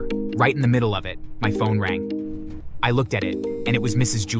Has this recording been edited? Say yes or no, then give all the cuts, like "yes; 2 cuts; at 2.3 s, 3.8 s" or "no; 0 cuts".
no; 0 cuts